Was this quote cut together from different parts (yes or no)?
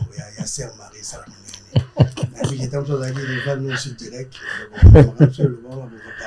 no